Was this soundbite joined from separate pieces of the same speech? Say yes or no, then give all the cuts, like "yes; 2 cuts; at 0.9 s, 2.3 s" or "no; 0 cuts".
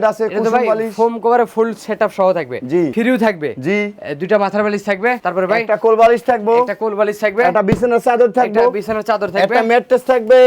yes; 2 cuts; at 2.9 s, 5.2 s